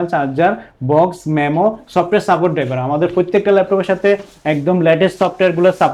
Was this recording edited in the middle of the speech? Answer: no; 0 cuts

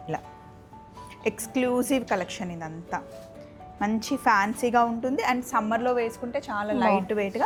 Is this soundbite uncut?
yes; 0 cuts

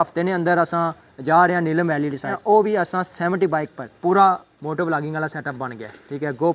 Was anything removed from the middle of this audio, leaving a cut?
yes; 2 cuts; at 2.3 s, 3.8 s

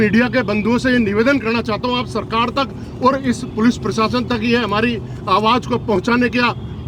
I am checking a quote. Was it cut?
no; 0 cuts

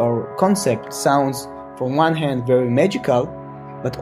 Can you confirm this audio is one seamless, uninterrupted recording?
no; 1 cut; at 0.9 s

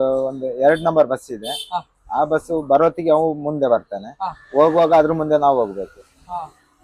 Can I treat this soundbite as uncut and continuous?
yes; 0 cuts

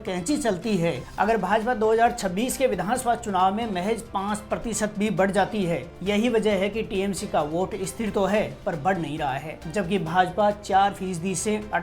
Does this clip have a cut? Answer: yes; 3 cuts; at 1.0 s, 5.9 s, 9.6 s

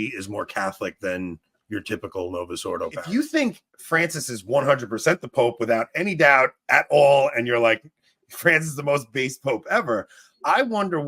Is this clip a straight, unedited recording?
no; 1 cut; at 3.0 s

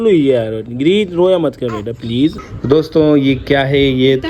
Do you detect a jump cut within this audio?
yes; 1 cut; at 2.5 s

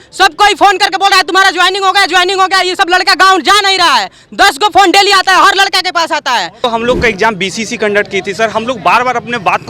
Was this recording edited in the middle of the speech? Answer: yes; 1 cut; at 6.6 s

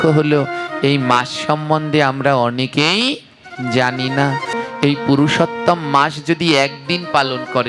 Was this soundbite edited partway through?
yes; 1 cut; at 4.5 s

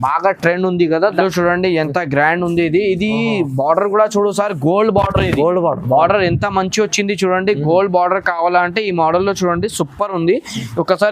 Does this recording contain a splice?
yes; 1 cut; at 1.2 s

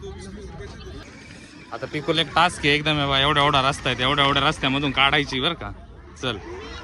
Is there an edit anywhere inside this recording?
yes; 1 cut; at 1.0 s

